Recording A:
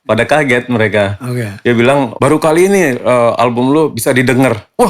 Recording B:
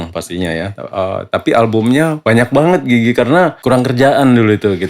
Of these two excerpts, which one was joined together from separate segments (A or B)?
B